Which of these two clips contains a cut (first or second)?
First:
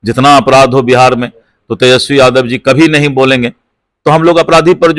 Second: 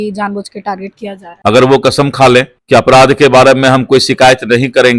second